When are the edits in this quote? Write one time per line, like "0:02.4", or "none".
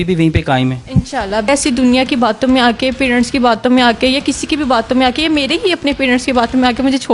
0:01.4